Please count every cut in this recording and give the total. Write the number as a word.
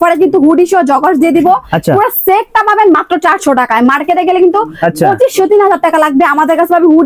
zero